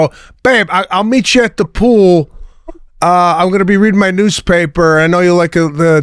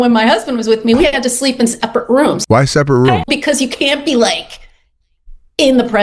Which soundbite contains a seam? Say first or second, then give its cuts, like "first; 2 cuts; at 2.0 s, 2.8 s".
second; 2 cuts; at 2.4 s, 3.2 s